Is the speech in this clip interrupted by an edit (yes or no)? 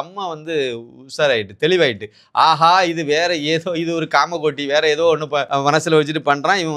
yes